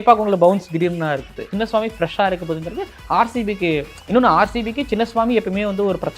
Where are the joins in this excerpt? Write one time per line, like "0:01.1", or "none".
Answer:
0:01.5